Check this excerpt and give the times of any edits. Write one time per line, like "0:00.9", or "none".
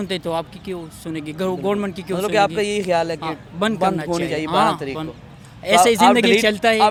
none

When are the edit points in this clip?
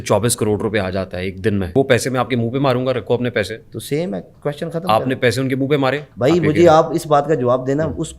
0:01.7
0:06.1

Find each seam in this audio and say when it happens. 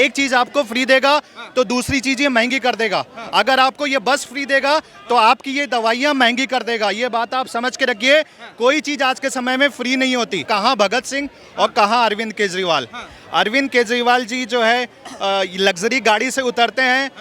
0:10.5

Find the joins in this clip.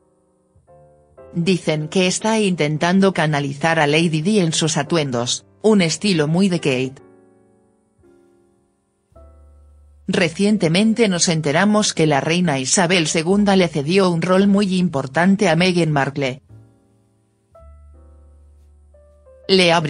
none

